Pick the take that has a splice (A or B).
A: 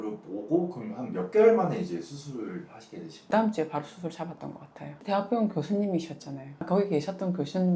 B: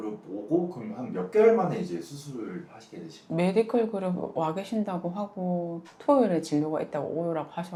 A